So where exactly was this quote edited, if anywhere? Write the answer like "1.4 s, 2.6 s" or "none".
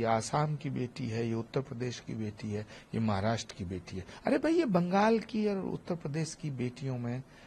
none